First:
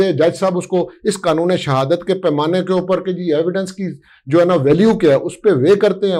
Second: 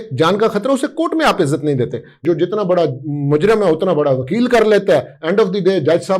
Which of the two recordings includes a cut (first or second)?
second